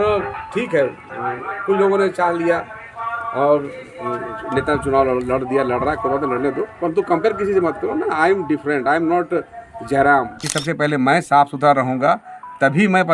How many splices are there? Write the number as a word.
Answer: one